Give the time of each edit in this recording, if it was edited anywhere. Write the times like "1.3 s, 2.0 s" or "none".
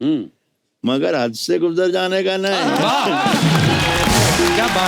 none